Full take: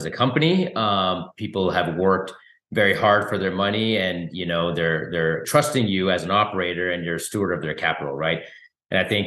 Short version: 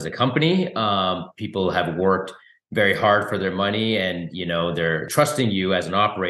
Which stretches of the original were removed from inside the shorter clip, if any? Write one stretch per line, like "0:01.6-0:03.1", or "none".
0:05.1-0:05.4